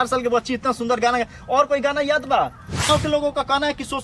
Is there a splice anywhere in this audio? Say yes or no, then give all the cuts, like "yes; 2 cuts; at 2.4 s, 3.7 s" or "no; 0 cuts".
yes; 1 cut; at 2.9 s